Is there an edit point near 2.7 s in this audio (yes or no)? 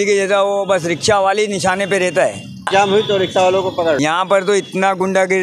yes